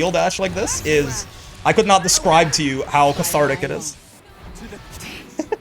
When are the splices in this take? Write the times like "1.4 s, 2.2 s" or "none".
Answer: 4.1 s